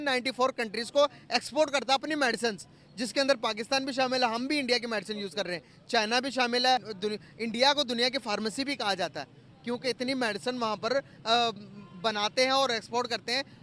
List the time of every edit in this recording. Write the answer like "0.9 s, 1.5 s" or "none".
6.9 s